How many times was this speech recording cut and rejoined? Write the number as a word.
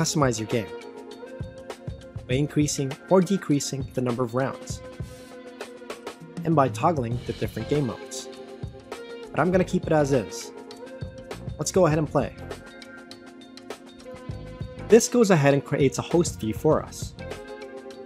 zero